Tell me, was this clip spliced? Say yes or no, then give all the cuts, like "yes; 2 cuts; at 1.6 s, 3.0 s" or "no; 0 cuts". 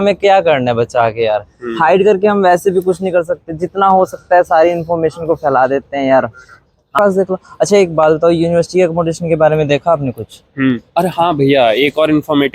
yes; 1 cut; at 7.0 s